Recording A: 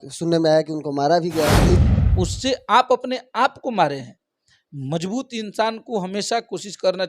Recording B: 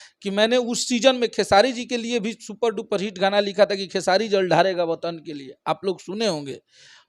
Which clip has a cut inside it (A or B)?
A